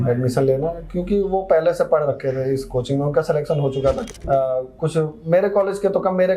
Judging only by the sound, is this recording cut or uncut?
cut